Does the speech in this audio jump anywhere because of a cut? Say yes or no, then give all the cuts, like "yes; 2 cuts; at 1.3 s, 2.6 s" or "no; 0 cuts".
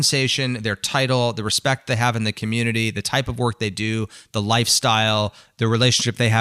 no; 0 cuts